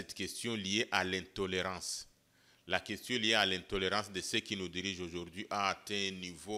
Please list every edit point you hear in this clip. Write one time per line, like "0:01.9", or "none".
none